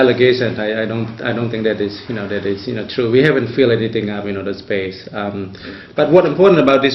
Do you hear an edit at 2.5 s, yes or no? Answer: yes